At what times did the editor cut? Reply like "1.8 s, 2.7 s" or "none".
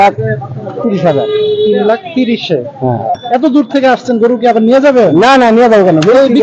3.2 s